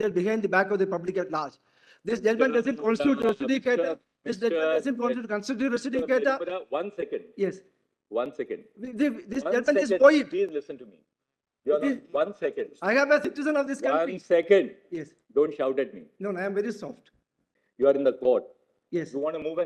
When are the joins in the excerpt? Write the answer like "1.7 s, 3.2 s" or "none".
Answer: 17.5 s